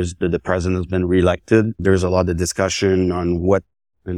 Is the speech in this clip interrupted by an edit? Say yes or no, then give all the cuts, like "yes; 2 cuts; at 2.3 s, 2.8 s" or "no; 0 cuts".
no; 0 cuts